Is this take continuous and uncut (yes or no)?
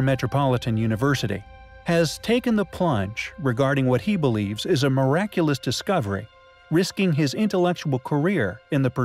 yes